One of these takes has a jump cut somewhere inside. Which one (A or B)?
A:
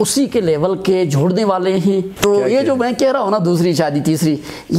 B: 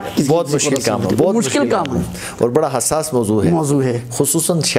A